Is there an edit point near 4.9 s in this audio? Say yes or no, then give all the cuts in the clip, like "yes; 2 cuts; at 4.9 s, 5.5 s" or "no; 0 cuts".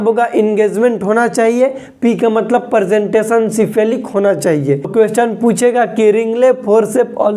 yes; 1 cut; at 4.9 s